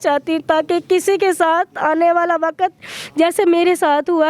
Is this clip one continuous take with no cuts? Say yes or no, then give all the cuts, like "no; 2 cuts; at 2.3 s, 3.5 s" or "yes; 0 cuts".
yes; 0 cuts